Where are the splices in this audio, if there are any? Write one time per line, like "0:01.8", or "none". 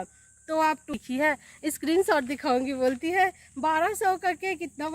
0:01.0